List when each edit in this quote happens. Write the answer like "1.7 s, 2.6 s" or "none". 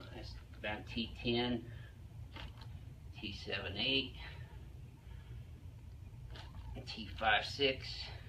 none